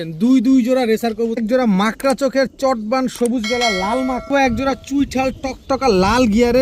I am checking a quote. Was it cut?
yes; 2 cuts; at 1.4 s, 4.3 s

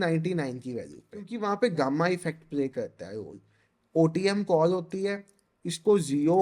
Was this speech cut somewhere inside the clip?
yes; 1 cut; at 1.3 s

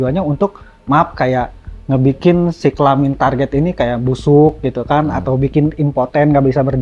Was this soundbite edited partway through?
no; 0 cuts

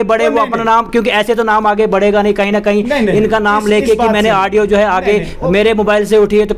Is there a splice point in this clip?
no; 0 cuts

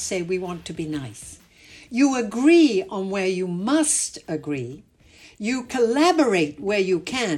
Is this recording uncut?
yes; 0 cuts

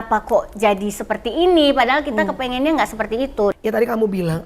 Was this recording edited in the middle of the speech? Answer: yes; 1 cut; at 3.5 s

